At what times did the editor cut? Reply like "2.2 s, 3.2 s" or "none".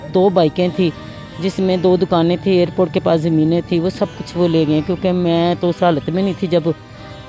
none